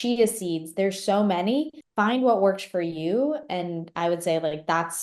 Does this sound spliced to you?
yes; 1 cut; at 1.8 s

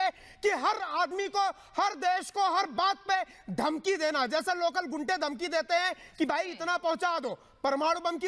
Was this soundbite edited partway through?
no; 0 cuts

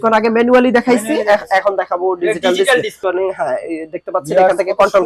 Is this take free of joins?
no; 1 cut; at 3.0 s

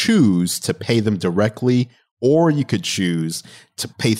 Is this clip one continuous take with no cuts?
no; 1 cut; at 2.0 s

